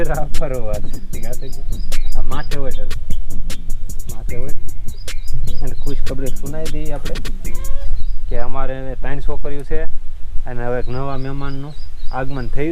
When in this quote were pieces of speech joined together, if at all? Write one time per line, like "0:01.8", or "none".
0:07.8